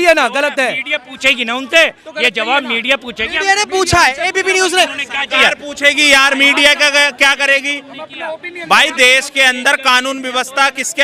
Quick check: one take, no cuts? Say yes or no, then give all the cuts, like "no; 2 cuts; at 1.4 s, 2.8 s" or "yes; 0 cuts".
yes; 0 cuts